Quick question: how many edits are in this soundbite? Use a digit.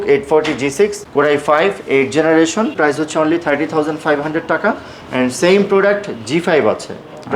2